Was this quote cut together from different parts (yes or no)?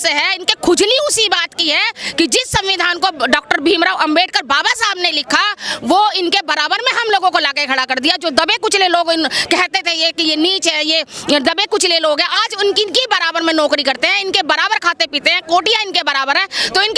no